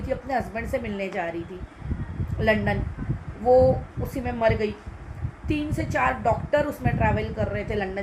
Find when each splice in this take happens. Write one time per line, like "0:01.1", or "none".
none